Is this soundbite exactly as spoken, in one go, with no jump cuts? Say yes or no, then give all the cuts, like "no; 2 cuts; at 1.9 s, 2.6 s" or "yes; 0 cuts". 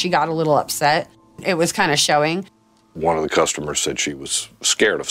no; 3 cuts; at 1.4 s, 2.6 s, 4.0 s